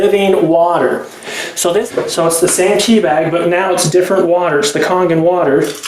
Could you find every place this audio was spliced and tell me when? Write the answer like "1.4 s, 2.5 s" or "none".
1.9 s